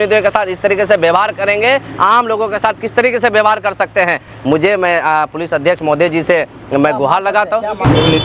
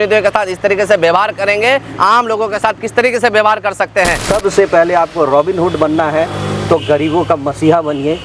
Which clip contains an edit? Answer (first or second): second